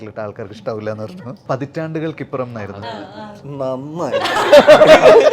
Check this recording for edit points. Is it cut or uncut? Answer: cut